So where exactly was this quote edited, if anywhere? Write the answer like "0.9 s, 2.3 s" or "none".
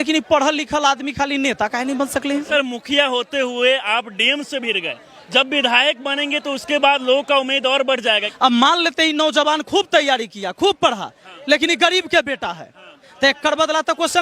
2.5 s, 8.2 s